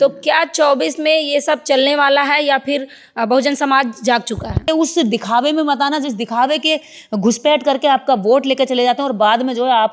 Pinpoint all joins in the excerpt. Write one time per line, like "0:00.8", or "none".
0:04.6